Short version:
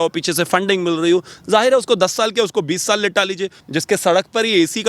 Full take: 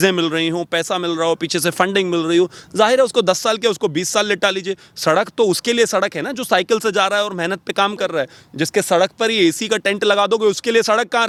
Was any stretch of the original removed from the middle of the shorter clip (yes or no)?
yes